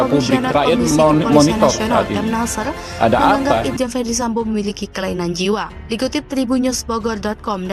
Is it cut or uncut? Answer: uncut